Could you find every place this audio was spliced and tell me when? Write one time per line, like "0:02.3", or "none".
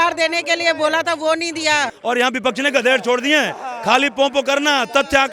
0:01.9